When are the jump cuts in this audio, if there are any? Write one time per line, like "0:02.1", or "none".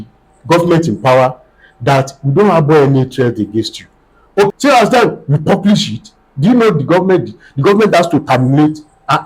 0:04.5